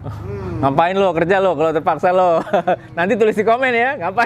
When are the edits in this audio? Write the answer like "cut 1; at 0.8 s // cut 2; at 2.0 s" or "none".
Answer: none